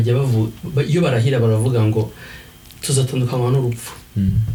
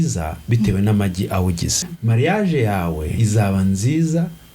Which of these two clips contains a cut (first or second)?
second